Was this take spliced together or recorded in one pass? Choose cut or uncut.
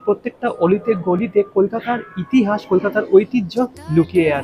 uncut